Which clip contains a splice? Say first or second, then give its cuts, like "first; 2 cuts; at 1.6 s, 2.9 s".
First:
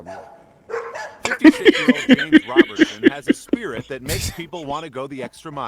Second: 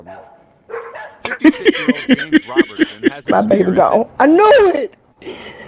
second; 1 cut; at 3.3 s